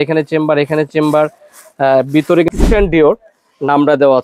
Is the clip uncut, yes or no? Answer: no